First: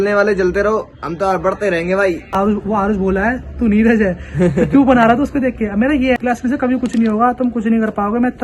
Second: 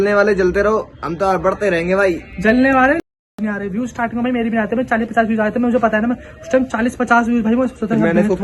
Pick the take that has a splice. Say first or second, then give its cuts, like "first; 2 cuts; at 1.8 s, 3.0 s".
first; 2 cuts; at 2.3 s, 6.3 s